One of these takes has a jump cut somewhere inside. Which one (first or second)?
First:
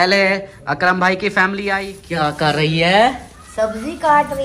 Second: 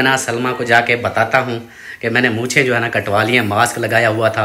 first